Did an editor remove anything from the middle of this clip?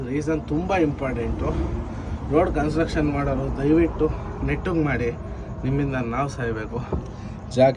no; 0 cuts

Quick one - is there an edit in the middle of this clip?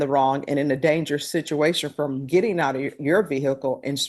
no; 0 cuts

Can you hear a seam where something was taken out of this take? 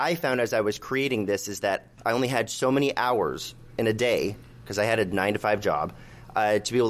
yes; 1 cut; at 1.9 s

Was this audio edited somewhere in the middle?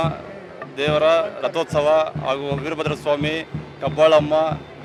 no; 0 cuts

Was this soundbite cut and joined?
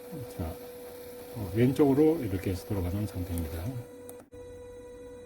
yes; 1 cut; at 4.3 s

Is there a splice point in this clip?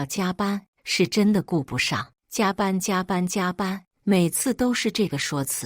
yes; 1 cut; at 2.2 s

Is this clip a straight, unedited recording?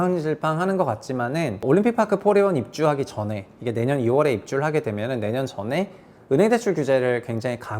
no; 1 cut; at 1.6 s

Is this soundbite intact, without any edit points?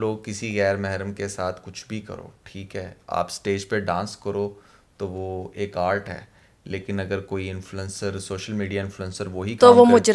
yes; 0 cuts

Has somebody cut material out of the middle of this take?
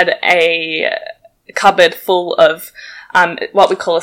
no; 0 cuts

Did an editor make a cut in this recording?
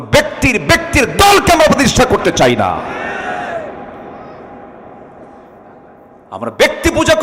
no; 0 cuts

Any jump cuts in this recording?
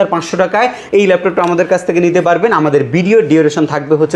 no; 0 cuts

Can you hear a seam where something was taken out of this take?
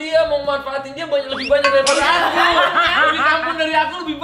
no; 0 cuts

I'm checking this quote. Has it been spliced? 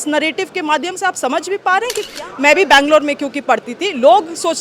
yes; 1 cut; at 2.1 s

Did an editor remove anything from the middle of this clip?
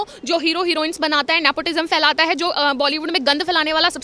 no; 0 cuts

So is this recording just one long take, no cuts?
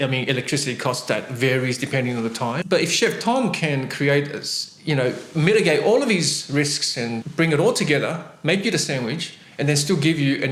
yes; 0 cuts

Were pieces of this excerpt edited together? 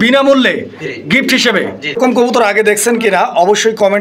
yes; 1 cut; at 2.0 s

